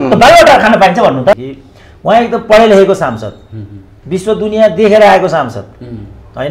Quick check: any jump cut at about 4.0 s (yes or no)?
no